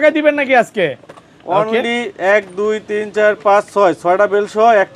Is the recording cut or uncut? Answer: uncut